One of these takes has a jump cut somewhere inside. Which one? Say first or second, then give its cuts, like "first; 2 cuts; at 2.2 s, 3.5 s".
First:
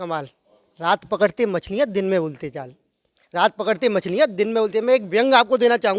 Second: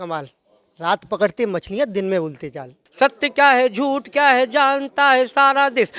second; 1 cut; at 2.8 s